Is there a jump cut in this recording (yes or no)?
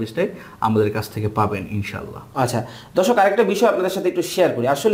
no